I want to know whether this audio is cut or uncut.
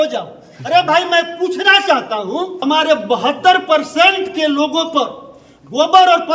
cut